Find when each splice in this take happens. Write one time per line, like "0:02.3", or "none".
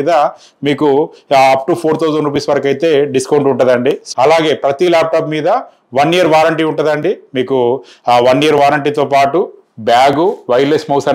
0:04.1